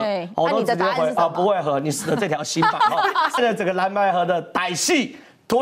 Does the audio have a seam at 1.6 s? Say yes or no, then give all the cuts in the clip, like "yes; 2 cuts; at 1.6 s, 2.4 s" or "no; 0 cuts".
no; 1 cut; at 3.4 s